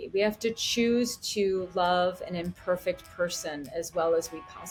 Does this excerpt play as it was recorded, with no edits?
yes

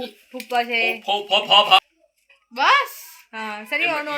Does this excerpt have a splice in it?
no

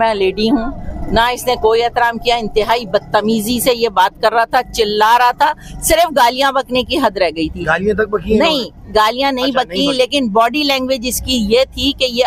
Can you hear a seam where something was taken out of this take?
no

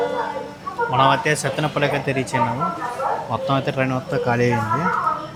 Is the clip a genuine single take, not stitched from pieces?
yes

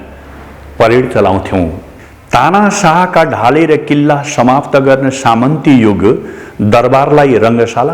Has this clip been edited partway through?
yes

